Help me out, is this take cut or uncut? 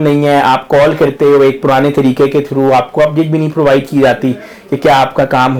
uncut